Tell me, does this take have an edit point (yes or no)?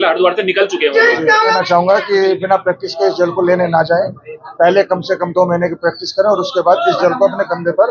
yes